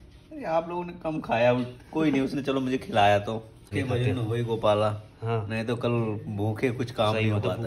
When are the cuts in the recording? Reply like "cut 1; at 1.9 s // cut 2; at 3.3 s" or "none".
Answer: cut 1; at 3.7 s